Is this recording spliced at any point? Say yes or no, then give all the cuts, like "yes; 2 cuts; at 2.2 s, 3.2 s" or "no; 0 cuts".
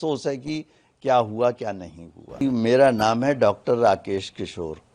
yes; 1 cut; at 2.4 s